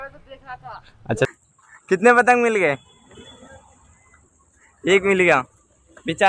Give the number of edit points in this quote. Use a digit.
1